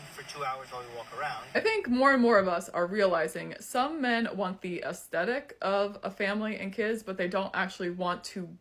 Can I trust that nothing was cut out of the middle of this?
no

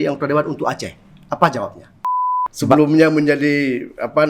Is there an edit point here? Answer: yes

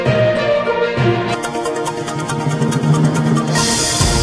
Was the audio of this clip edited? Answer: no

